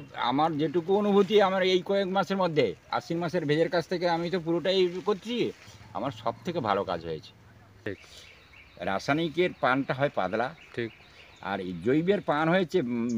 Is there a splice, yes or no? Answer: yes